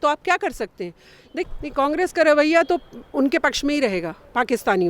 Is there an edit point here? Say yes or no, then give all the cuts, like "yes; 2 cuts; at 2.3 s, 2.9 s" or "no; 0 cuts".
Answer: yes; 1 cut; at 1.4 s